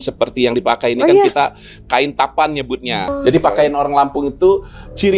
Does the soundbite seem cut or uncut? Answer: cut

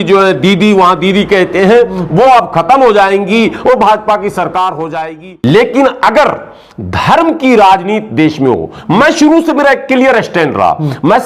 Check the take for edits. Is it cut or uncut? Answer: cut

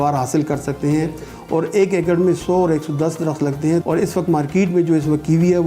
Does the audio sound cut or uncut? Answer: cut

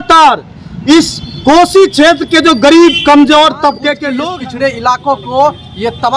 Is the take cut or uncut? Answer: cut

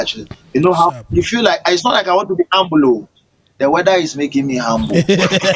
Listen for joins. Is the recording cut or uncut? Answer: uncut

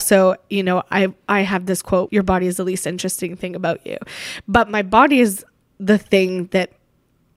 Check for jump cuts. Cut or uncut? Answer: cut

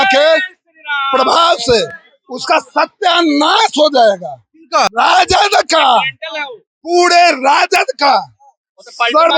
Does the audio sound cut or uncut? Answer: cut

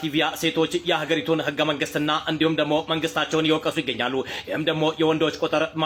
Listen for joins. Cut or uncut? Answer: uncut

